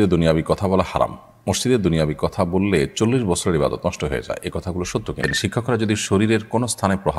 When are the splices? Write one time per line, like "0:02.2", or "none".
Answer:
0:05.3